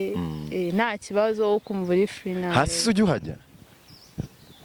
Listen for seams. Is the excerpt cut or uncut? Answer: uncut